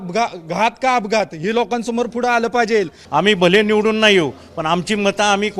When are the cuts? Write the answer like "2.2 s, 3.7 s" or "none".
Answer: 3.0 s